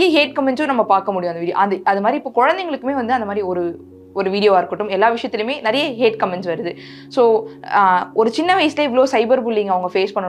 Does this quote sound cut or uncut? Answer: uncut